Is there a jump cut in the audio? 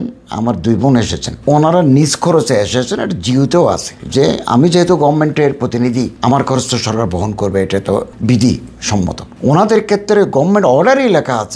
no; 0 cuts

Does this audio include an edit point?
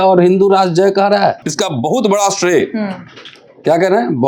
yes; 1 cut; at 1.4 s

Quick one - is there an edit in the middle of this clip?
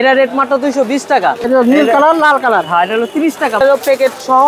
yes; 2 cuts; at 1.4 s, 3.6 s

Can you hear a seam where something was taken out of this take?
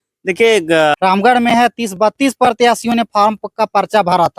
yes; 1 cut; at 0.9 s

